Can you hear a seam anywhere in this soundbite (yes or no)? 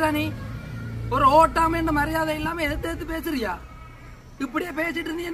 no